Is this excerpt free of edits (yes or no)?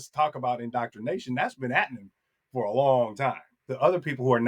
no